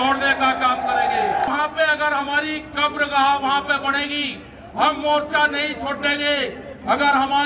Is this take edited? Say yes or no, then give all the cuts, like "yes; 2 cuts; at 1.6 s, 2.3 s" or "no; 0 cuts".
yes; 1 cut; at 1.5 s